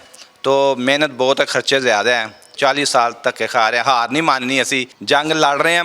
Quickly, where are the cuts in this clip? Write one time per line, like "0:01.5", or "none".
0:02.5
0:04.9